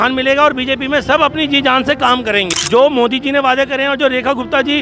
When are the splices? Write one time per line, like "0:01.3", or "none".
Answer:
0:02.6